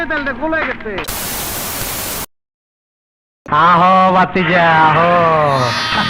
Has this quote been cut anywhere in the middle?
yes; 1 cut; at 1.0 s

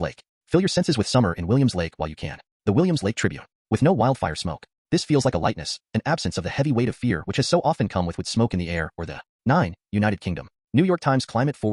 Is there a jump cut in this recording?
no; 0 cuts

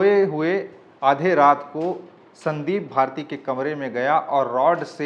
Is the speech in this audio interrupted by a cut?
no; 0 cuts

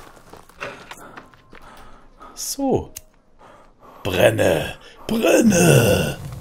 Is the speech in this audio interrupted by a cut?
no; 0 cuts

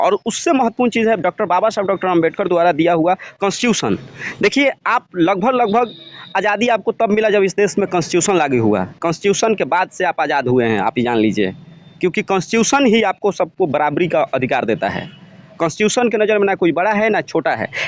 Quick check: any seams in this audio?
no; 0 cuts

